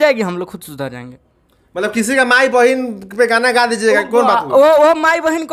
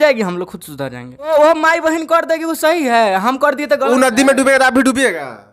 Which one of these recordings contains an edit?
second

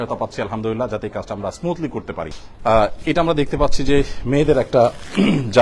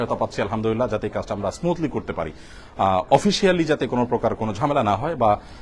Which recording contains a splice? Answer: first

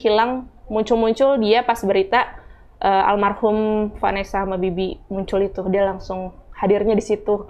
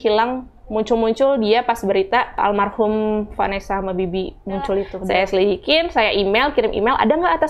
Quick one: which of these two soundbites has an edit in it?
second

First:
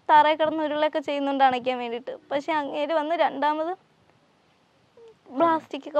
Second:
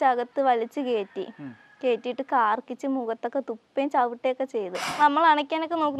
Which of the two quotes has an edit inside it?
second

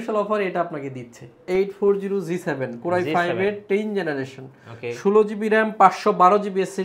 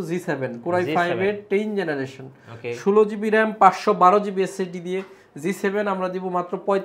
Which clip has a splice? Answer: first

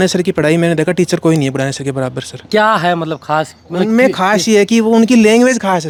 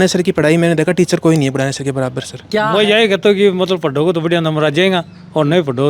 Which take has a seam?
second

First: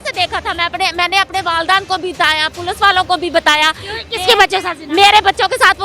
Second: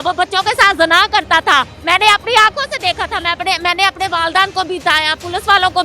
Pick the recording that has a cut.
second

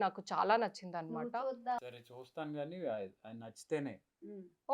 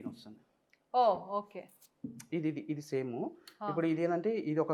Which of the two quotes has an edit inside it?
first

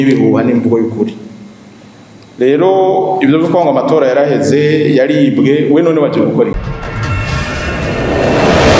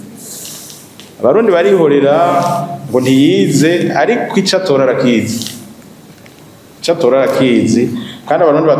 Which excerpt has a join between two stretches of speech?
first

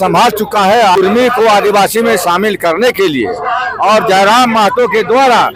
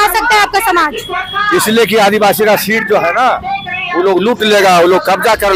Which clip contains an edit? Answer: first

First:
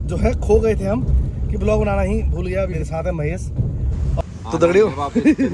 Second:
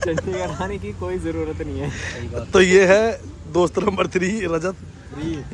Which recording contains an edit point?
first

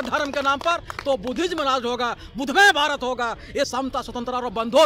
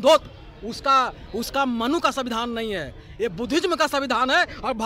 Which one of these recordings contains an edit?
first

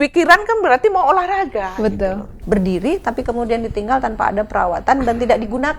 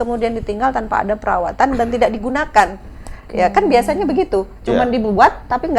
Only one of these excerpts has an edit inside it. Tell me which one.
first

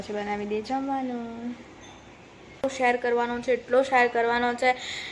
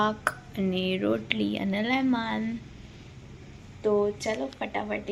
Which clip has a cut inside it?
first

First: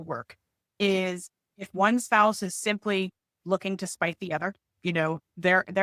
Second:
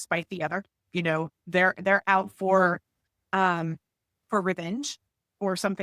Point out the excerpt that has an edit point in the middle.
second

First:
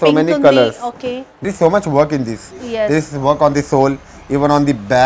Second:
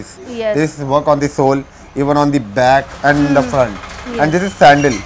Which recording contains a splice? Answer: first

